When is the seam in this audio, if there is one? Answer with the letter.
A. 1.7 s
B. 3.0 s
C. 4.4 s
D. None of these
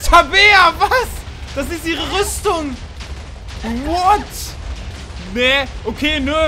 D